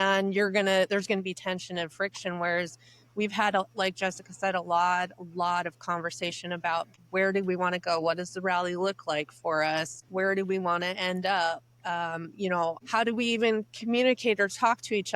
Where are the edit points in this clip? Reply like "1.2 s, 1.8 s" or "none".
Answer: 6.9 s, 10.0 s, 12.8 s